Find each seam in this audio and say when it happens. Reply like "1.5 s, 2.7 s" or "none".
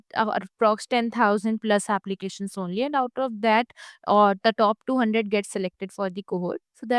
none